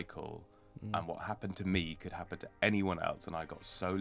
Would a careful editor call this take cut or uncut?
uncut